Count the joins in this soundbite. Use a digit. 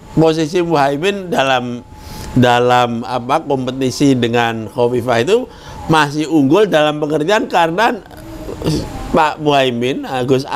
0